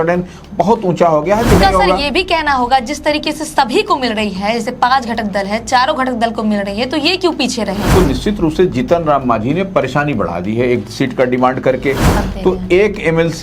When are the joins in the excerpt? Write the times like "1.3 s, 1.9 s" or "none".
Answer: 1.6 s, 8.0 s, 12.2 s